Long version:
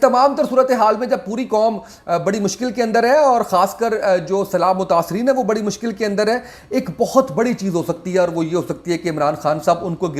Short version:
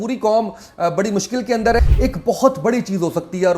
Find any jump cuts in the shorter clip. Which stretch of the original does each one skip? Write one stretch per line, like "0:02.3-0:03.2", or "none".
0:03.1-0:06.5